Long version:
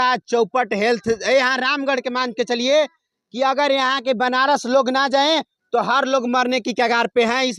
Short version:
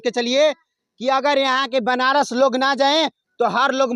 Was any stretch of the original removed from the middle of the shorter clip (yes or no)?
no